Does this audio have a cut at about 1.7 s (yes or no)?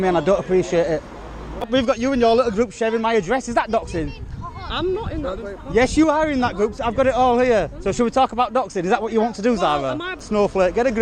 yes